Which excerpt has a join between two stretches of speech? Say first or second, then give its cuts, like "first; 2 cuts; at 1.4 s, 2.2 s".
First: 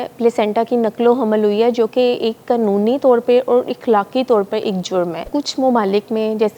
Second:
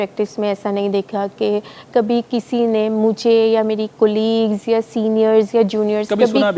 first; 1 cut; at 5.2 s